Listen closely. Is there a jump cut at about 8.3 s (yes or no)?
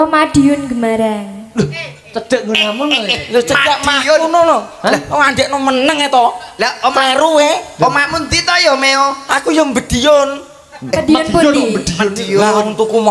no